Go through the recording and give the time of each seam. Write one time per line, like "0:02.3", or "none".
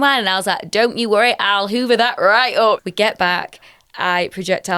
0:02.8